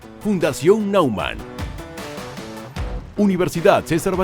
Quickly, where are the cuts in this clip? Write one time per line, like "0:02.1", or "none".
0:03.1